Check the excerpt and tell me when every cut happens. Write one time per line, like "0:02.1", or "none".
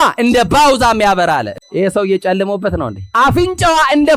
0:01.5
0:03.0